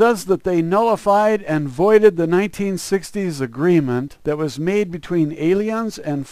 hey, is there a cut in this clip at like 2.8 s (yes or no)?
no